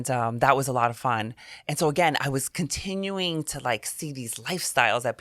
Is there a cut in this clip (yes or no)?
no